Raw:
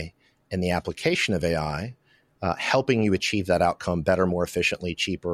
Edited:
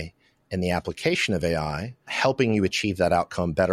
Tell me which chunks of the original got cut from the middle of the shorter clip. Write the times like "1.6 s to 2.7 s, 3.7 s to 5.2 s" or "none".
2.1 s to 2.6 s